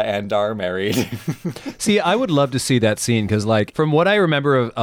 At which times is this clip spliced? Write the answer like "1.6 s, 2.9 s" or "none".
3.7 s

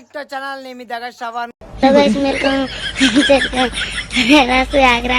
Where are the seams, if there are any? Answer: 1.4 s

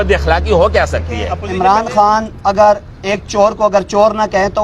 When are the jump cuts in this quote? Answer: 1.4 s

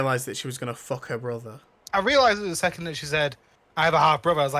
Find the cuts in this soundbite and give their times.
1.7 s

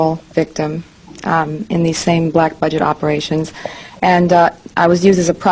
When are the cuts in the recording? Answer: none

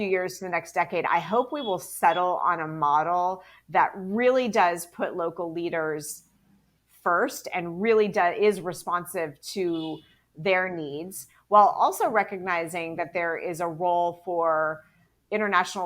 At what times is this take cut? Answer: none

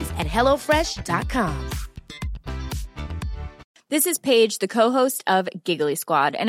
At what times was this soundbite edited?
3.7 s

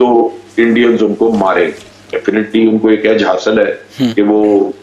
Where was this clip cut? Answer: 2.1 s

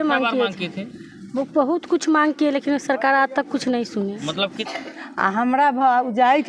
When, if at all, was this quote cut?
4.6 s

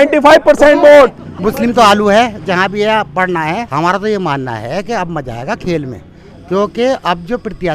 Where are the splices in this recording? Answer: 1.3 s, 3.7 s

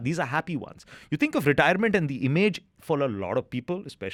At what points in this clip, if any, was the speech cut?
none

